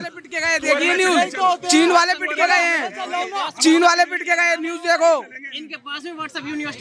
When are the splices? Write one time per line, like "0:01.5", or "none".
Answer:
none